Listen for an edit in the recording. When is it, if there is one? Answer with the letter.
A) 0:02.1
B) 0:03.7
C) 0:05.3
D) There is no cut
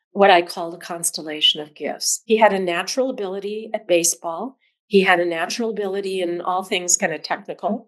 A